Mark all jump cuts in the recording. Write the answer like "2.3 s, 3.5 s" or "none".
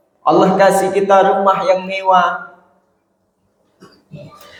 none